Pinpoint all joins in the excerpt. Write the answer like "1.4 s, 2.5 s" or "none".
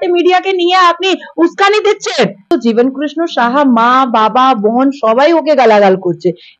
2.5 s